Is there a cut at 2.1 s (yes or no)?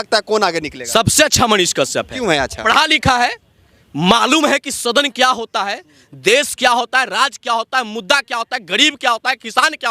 no